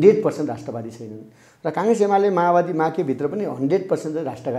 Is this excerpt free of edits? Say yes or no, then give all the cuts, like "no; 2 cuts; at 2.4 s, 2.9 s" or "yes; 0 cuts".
yes; 0 cuts